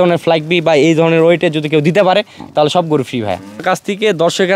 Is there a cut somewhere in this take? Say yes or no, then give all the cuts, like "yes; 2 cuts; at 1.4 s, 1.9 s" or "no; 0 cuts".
yes; 1 cut; at 3.6 s